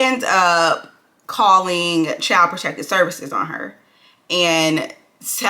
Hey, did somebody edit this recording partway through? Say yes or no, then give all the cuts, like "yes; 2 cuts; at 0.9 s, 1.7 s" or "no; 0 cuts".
no; 0 cuts